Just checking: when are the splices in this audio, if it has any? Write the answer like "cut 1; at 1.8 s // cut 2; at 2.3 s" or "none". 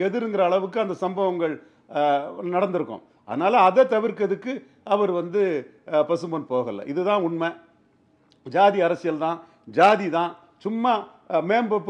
none